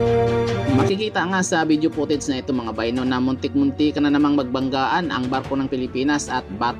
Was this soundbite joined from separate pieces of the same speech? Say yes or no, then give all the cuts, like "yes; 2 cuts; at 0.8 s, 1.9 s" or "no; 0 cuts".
no; 0 cuts